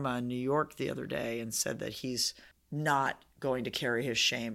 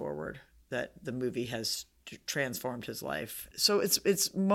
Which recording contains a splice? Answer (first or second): second